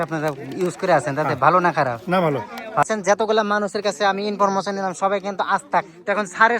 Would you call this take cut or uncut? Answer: cut